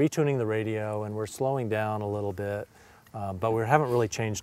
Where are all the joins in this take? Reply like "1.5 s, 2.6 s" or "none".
none